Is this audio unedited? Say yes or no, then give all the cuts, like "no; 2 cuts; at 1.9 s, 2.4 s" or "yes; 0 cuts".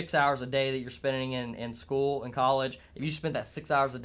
yes; 0 cuts